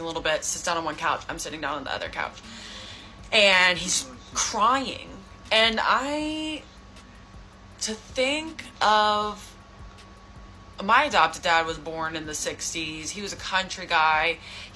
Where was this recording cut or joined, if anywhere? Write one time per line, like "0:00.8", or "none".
none